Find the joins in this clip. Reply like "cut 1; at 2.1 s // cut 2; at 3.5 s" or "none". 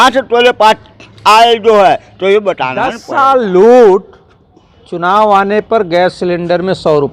cut 1; at 3.0 s